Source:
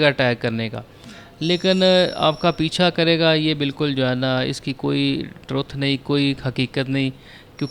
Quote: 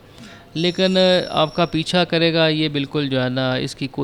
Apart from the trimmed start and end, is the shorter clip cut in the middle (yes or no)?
no